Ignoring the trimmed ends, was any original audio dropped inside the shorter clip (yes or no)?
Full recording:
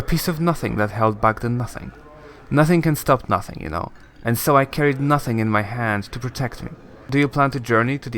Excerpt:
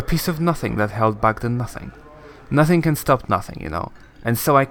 no